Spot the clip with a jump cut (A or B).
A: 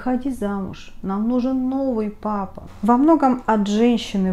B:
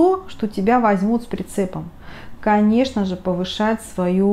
A